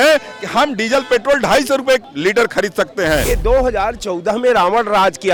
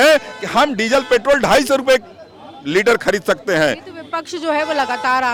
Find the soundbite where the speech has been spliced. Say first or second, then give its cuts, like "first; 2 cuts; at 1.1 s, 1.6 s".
first; 2 cuts; at 2.1 s, 3.2 s